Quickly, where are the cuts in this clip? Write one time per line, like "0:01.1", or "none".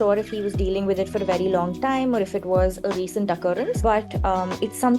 0:03.8